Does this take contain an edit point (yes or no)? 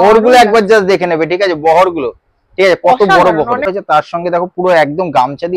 yes